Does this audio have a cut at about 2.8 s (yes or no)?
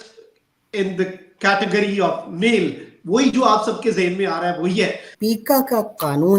no